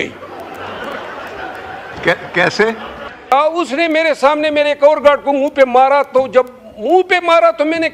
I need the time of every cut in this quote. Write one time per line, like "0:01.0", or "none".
0:03.3